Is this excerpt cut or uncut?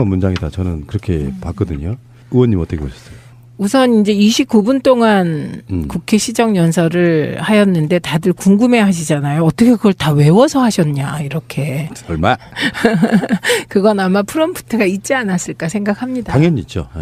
uncut